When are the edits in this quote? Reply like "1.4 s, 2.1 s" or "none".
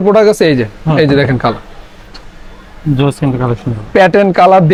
none